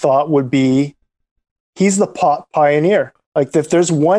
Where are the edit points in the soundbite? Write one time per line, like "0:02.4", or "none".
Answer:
0:03.2